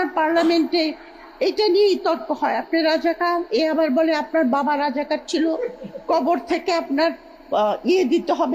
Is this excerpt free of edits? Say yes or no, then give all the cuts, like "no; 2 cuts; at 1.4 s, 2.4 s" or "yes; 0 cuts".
yes; 0 cuts